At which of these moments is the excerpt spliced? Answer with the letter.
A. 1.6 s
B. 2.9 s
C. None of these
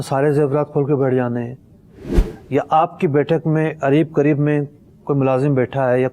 C